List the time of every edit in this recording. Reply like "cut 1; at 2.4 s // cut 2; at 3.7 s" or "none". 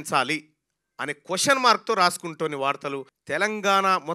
cut 1; at 3.1 s